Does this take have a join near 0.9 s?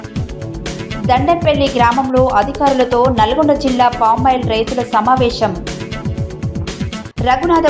yes; 1 cut; at 0.9 s

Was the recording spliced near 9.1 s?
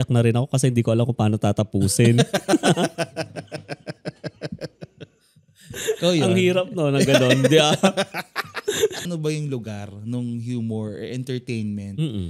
yes; 1 cut; at 9.1 s

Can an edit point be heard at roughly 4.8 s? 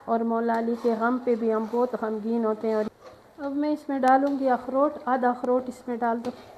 no; 1 cut; at 2.9 s

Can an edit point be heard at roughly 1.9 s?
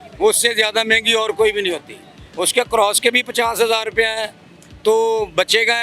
no; 0 cuts

